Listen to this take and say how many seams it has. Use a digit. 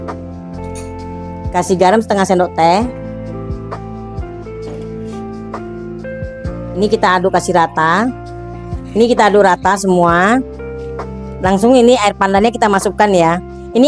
3